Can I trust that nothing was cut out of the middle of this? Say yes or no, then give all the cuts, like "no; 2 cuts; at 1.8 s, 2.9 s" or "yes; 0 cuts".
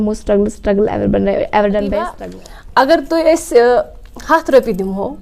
no; 1 cut; at 2.2 s